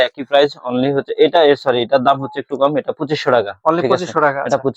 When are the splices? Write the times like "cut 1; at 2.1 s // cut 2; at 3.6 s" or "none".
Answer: none

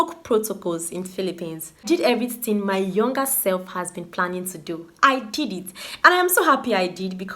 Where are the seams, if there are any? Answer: cut 1; at 1.8 s

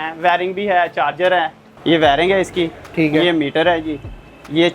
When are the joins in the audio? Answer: cut 1; at 1.6 s

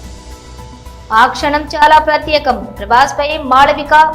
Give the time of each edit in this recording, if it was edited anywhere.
cut 1; at 0.9 s

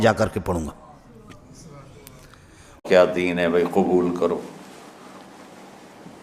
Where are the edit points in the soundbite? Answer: cut 1; at 2.8 s

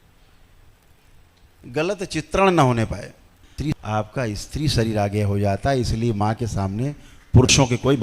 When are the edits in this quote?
cut 1; at 3.4 s

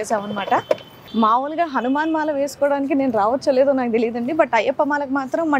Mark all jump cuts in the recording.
cut 1; at 1.0 s

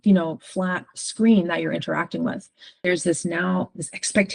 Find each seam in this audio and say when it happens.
cut 1; at 2.8 s

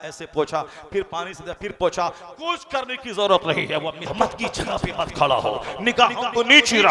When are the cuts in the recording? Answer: cut 1; at 4.1 s

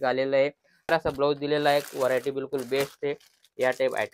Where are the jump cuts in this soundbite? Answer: cut 1; at 0.9 s

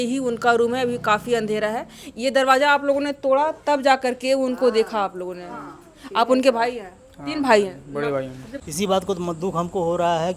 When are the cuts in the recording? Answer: cut 1; at 8.4 s

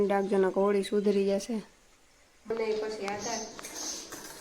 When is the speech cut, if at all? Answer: cut 1; at 2.5 s

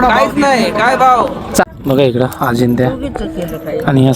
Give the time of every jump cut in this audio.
cut 1; at 1.6 s

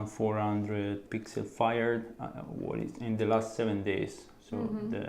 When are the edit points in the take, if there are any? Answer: cut 1; at 1.0 s

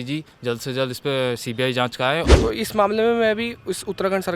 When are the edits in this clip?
cut 1; at 2.3 s

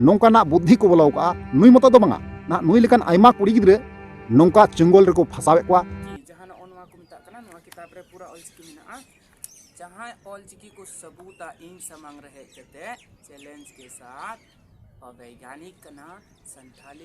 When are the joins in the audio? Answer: cut 1; at 6.0 s

